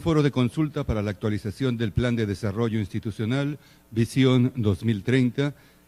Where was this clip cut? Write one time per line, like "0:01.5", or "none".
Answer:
none